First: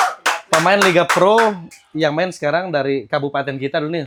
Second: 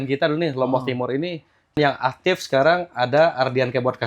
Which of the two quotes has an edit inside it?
second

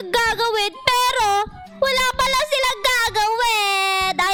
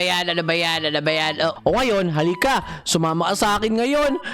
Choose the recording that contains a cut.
second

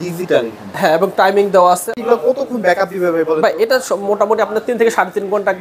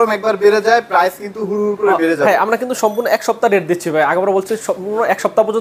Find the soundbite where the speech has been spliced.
first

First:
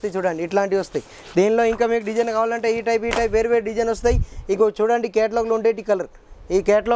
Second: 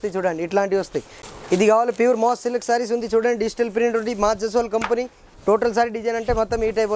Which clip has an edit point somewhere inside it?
second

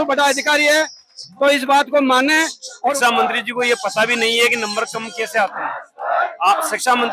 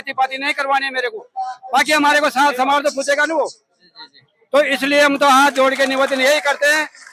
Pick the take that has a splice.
first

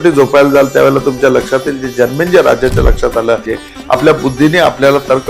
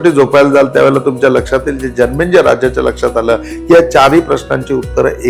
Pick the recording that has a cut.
first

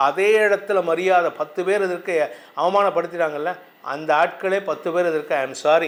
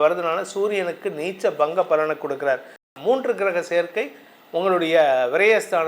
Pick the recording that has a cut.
second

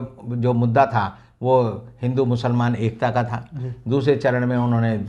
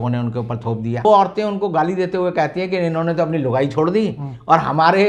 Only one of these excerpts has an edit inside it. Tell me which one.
second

